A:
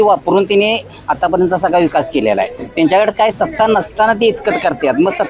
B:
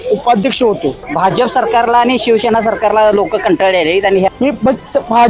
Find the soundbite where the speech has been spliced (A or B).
B